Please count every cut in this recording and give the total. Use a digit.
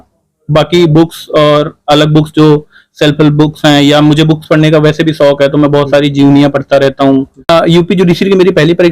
1